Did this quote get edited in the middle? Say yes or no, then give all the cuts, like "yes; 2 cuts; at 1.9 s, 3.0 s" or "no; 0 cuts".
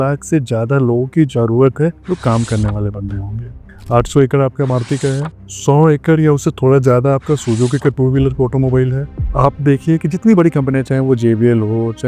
yes; 2 cuts; at 2.0 s, 3.7 s